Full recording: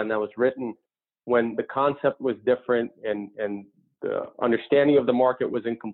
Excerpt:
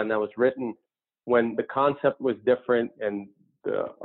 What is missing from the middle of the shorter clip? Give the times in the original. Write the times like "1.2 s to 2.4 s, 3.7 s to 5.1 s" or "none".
2.9 s to 3.3 s